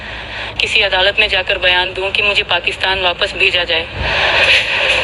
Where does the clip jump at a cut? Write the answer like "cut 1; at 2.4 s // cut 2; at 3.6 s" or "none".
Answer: cut 1; at 4.0 s